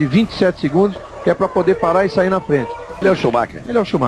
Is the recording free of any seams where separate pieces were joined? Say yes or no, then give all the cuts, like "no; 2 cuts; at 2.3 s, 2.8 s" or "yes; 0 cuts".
no; 1 cut; at 3.0 s